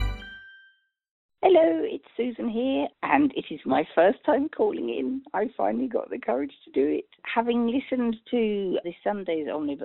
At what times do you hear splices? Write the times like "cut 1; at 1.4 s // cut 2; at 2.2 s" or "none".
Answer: cut 1; at 1.3 s // cut 2; at 2.9 s // cut 3; at 6.9 s // cut 4; at 8.8 s